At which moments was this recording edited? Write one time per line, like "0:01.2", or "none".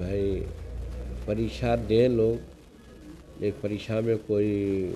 none